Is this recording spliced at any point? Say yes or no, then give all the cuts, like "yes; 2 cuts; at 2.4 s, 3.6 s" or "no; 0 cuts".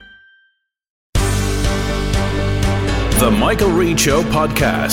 yes; 1 cut; at 1.0 s